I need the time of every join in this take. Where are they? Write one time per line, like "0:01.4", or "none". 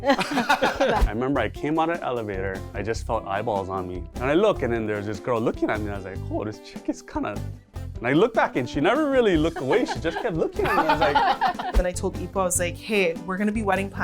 0:01.0
0:02.7
0:04.0
0:11.7